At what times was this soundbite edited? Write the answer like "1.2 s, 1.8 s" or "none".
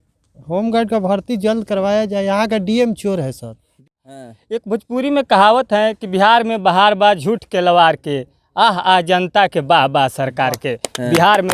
3.7 s